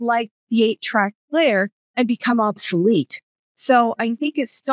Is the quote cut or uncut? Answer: uncut